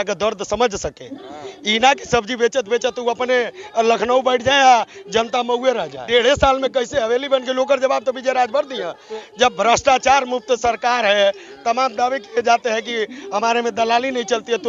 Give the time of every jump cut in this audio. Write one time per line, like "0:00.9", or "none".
0:06.0